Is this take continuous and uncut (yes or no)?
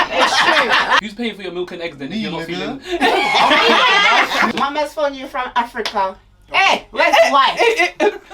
no